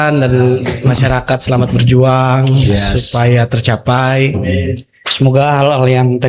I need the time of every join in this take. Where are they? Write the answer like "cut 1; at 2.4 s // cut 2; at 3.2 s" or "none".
none

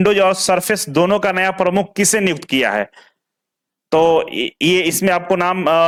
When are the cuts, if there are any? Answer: none

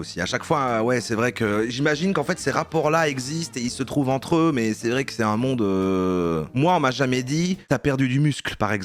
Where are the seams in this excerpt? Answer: none

